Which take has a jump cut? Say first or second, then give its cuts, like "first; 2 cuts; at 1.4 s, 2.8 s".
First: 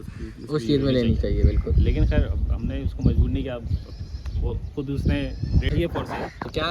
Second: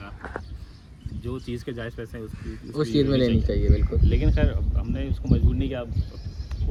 first; 1 cut; at 5.7 s